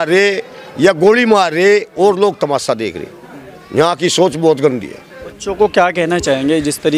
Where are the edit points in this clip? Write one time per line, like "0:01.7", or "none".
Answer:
none